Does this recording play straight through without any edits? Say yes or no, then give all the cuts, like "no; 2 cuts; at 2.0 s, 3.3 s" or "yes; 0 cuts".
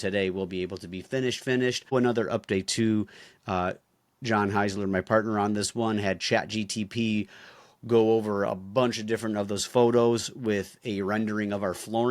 no; 1 cut; at 1.9 s